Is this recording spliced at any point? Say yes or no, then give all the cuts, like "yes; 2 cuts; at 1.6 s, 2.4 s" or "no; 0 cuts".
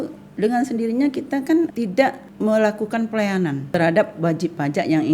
yes; 2 cuts; at 1.7 s, 3.7 s